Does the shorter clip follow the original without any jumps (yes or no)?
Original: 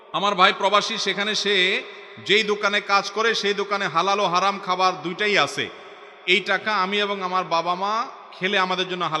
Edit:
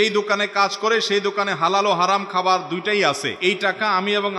no